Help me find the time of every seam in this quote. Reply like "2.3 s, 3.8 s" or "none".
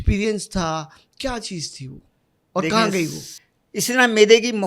3.2 s

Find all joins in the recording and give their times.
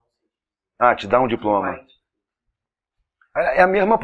3.1 s

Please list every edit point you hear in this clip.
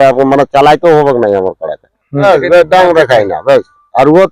2.2 s

